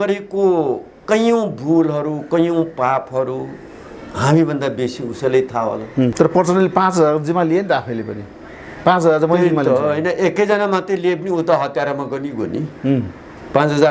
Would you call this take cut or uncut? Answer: cut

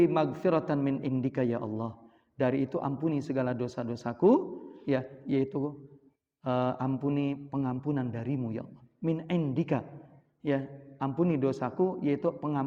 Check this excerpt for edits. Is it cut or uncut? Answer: uncut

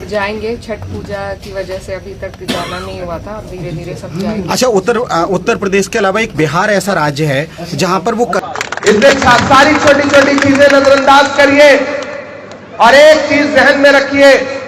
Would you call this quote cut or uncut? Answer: cut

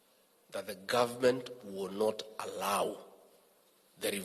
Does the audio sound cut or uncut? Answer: uncut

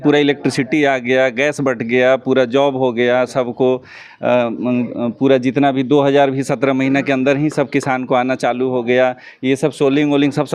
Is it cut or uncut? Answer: uncut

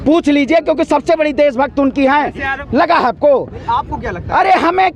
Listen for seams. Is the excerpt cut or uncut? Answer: cut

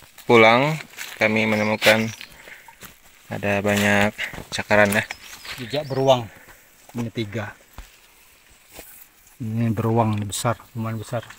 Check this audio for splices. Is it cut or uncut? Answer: uncut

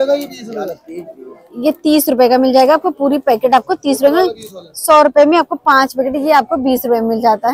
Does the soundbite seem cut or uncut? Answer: uncut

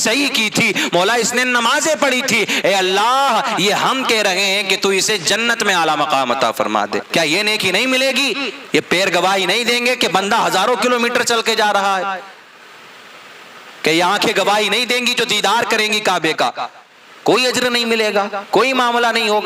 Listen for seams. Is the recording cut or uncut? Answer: cut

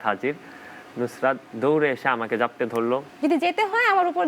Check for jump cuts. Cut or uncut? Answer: cut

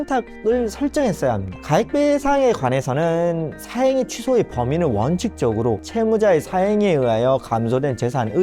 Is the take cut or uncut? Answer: cut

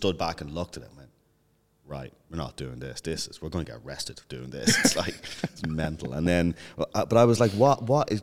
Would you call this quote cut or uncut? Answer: uncut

